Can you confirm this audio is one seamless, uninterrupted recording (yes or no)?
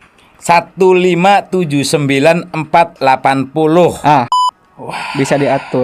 no